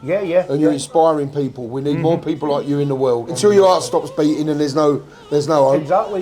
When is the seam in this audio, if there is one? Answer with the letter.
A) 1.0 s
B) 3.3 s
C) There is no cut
B